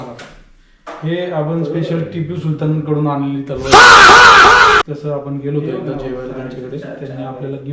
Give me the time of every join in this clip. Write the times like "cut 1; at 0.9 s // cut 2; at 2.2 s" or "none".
none